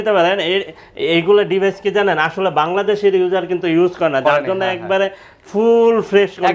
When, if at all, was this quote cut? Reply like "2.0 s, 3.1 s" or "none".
none

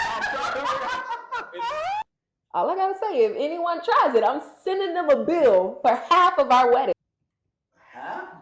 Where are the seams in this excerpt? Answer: 2.0 s

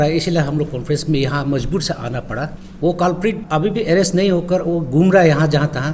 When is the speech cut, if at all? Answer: 2.6 s, 3.4 s

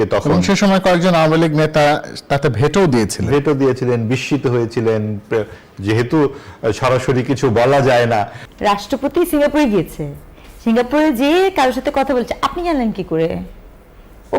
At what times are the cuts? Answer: 8.4 s

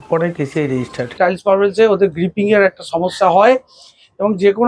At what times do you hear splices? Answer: 1.2 s

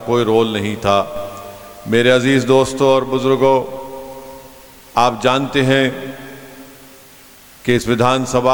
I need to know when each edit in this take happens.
none

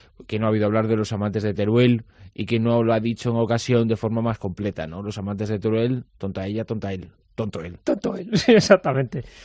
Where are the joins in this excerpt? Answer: none

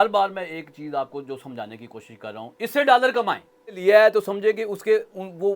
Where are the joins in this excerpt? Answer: 3.8 s

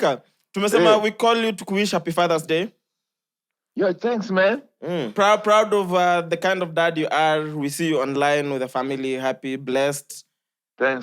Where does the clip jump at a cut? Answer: none

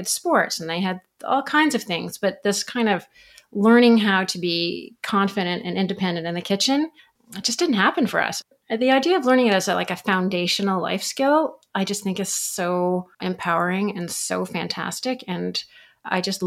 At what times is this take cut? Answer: 8.3 s

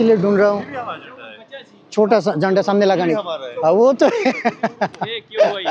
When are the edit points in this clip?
none

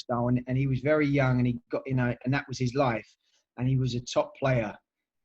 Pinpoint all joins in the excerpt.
none

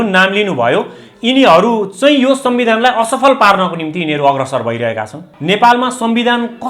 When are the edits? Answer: 5.3 s

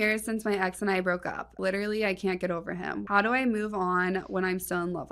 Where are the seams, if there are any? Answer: 1.6 s, 3.0 s

